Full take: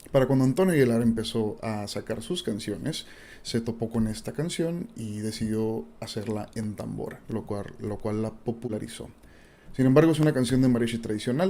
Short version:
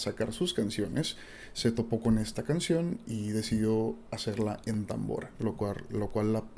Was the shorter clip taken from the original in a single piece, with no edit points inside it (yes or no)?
yes